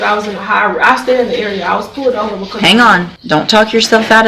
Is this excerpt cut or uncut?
cut